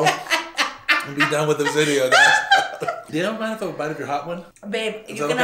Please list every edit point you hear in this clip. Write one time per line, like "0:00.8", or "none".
0:03.0
0:04.4